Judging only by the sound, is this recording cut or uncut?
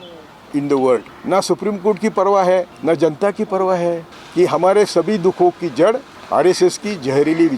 cut